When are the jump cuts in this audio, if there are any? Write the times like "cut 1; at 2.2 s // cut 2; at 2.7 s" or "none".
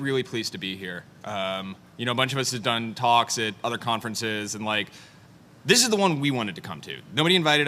cut 1; at 1.2 s